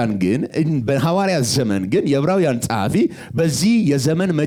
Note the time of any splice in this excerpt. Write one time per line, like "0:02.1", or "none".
none